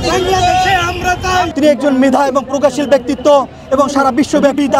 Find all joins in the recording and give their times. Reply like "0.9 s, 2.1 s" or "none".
none